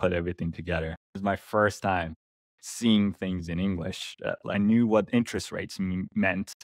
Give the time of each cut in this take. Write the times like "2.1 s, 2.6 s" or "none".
1.1 s, 4.5 s